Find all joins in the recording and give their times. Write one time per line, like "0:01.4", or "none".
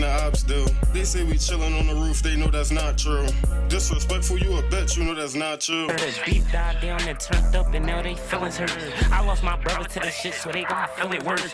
0:01.4
0:05.2
0:05.9